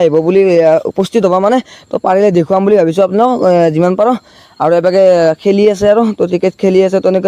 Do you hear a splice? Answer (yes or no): no